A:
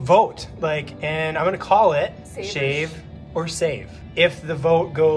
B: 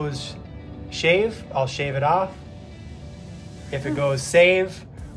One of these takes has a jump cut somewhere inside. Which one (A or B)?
A